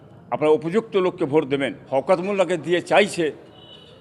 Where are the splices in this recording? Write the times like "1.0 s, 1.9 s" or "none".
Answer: 1.8 s